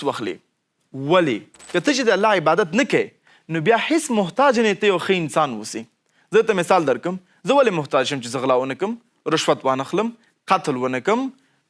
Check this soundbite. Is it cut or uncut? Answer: cut